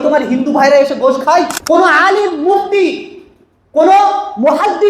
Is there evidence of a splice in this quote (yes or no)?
yes